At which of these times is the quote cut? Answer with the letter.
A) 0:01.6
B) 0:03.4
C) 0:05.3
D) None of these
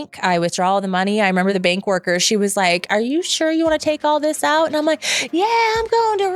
A